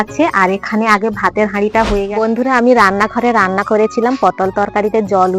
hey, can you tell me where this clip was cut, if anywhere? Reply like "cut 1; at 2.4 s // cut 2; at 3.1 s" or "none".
cut 1; at 2.1 s